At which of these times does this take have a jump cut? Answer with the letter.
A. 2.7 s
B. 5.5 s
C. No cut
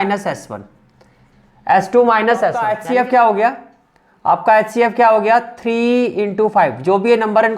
A